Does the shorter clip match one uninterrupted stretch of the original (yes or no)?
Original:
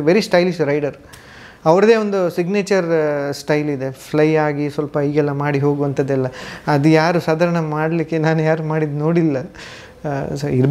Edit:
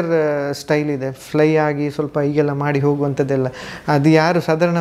yes